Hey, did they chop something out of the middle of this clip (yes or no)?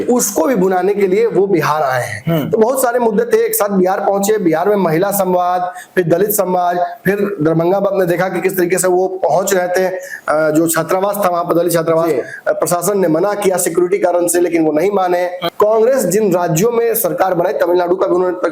yes